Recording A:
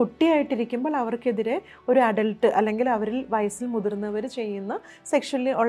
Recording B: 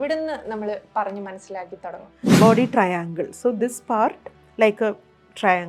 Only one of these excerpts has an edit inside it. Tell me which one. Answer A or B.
B